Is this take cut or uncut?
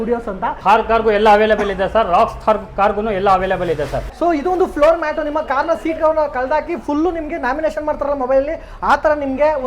cut